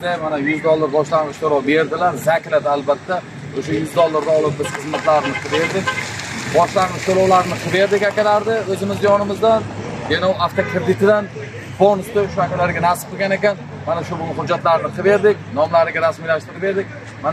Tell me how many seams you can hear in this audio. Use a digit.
0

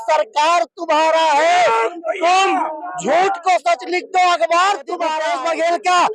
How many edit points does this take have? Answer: 1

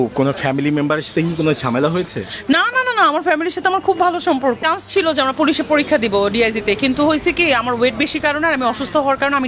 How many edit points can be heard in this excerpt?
1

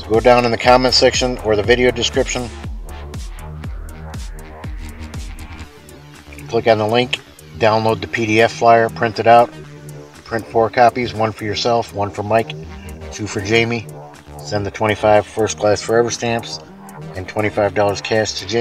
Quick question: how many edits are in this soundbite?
2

